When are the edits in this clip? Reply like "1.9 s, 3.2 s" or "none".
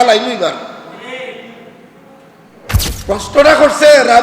2.9 s